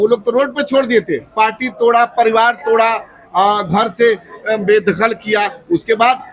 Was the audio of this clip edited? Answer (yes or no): no